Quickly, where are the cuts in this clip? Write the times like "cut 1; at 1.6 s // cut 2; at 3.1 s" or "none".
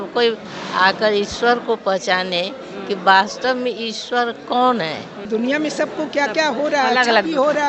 cut 1; at 5.2 s